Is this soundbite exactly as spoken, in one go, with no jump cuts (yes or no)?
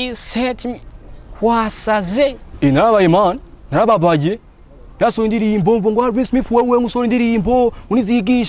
no